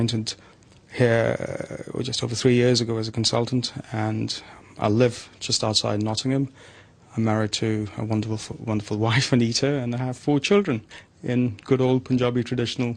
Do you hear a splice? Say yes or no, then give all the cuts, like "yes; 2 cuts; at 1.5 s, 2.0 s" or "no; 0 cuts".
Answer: no; 0 cuts